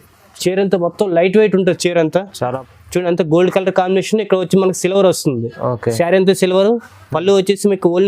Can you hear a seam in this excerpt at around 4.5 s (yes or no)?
no